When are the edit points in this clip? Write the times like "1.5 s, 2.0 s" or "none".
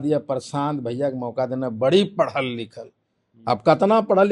none